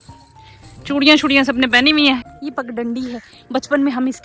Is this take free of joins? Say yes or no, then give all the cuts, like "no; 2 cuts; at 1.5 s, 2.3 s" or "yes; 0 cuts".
no; 1 cut; at 2.3 s